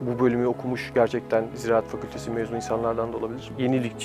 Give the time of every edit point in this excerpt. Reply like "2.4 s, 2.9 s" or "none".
none